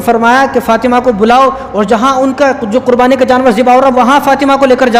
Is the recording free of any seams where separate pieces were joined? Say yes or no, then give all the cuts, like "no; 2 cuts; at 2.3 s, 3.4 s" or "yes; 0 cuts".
yes; 0 cuts